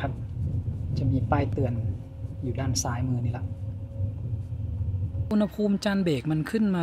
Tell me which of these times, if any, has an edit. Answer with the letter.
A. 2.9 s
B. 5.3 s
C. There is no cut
B